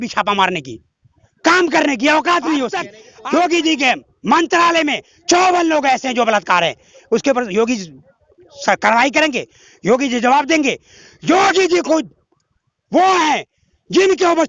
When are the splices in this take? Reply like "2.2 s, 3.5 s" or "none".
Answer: 3.0 s